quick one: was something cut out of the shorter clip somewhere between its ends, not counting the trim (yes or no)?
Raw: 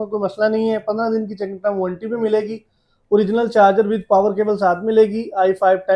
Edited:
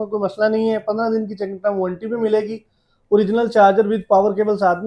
no